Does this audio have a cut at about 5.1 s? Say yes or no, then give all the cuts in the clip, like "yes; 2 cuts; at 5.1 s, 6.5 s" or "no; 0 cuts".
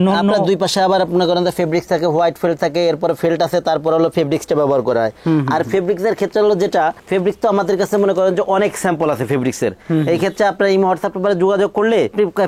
no; 0 cuts